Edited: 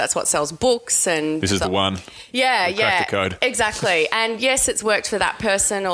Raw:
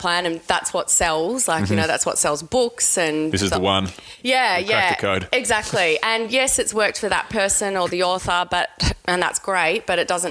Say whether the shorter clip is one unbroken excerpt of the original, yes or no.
yes